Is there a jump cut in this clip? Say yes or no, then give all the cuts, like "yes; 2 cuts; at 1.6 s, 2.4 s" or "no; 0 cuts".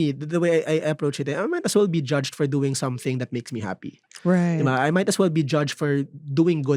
no; 0 cuts